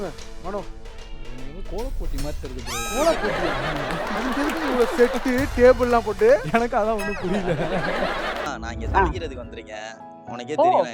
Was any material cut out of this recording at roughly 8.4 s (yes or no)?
yes